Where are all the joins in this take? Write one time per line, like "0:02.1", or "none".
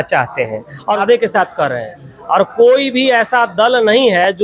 0:01.0